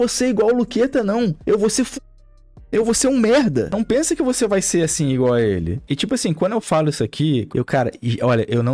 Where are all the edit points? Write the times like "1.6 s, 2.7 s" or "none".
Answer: 3.7 s, 5.8 s, 7.5 s